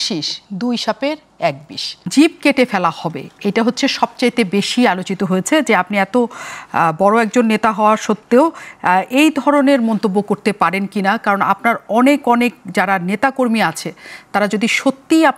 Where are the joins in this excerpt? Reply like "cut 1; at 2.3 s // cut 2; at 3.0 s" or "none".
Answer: cut 1; at 2.0 s

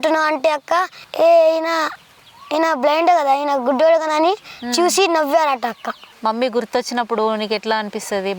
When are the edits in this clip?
cut 1; at 1.0 s // cut 2; at 6.1 s

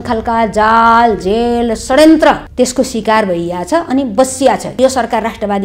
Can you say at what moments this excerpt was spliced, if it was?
cut 1; at 2.5 s // cut 2; at 4.8 s

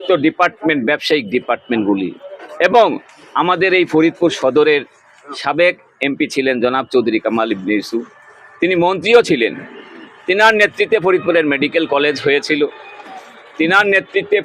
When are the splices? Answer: none

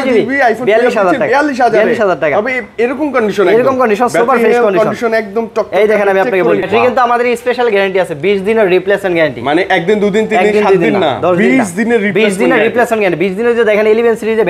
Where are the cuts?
cut 1; at 6.7 s

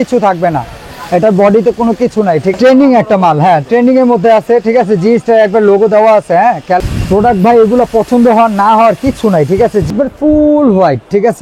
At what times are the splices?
cut 1; at 2.5 s // cut 2; at 6.8 s // cut 3; at 9.9 s

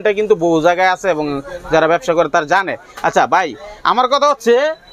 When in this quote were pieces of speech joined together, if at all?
none

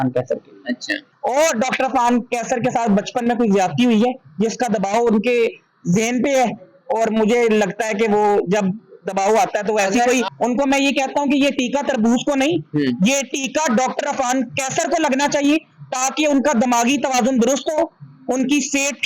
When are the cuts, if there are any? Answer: cut 1; at 1.1 s // cut 2; at 10.3 s

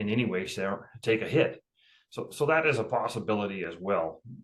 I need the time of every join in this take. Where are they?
none

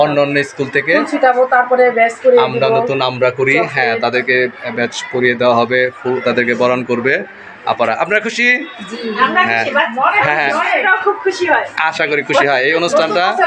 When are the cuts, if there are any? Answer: cut 1; at 6.2 s

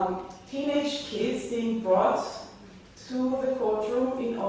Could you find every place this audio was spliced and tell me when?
none

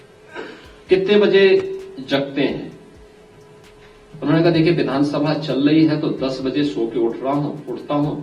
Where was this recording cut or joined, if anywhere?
none

